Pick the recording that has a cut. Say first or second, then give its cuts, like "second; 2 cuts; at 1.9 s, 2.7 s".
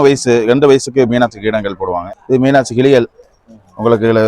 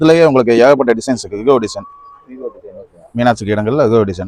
first; 1 cut; at 2.1 s